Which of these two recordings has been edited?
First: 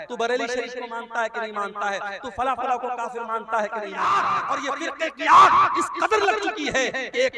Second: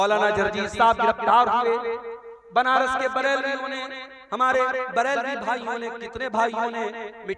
first; 1 cut; at 3.9 s

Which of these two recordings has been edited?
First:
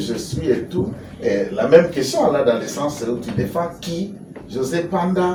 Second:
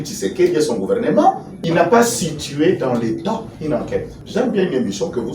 second; 1 cut; at 1.5 s

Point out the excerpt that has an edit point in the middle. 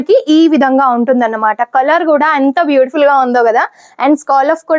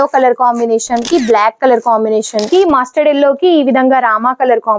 second; 2 cuts; at 1.1 s, 2.5 s

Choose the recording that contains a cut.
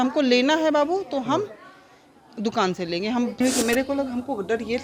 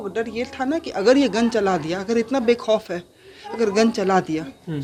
first; 1 cut; at 3.4 s

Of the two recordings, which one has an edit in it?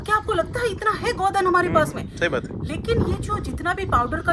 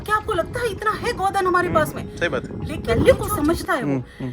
second; 1 cut; at 3.0 s

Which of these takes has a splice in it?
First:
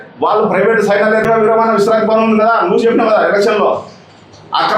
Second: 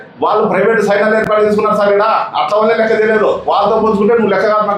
first; 1 cut; at 1.2 s

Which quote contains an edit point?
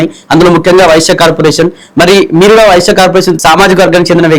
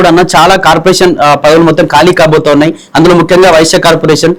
first; 1 cut; at 3.3 s

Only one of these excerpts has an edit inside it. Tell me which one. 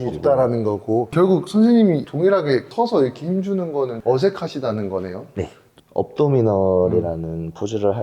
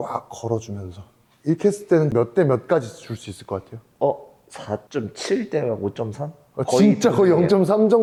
first; 2 cuts; at 1.1 s, 5.7 s

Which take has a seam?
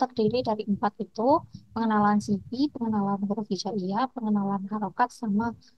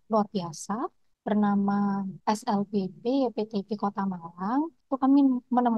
second; 3 cuts; at 1.1 s, 2.1 s, 4.8 s

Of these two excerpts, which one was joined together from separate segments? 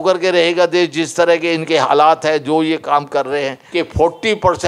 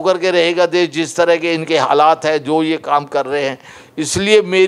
first; 1 cut; at 3.6 s

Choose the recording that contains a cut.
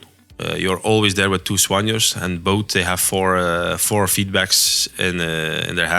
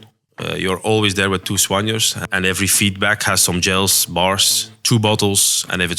second; 1 cut; at 2.1 s

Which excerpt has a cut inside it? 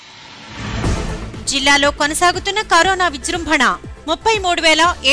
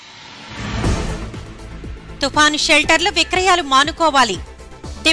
first; 1 cut; at 1.3 s

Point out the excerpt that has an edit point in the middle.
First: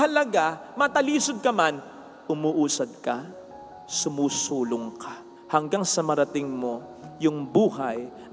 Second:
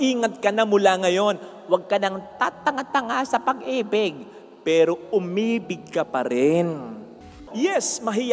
second; 1 cut; at 7.3 s

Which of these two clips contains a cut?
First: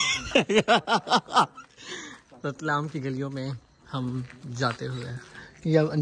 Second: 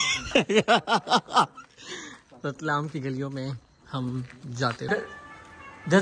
second; 1 cut; at 4.9 s

